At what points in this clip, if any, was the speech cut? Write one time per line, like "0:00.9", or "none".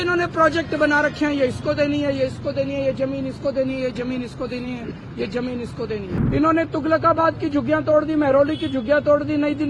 0:06.1